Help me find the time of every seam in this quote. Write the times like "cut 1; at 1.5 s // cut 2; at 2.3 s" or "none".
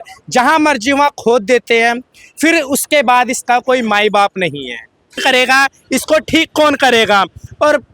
cut 1; at 5.2 s